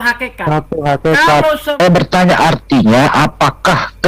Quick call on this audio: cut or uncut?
cut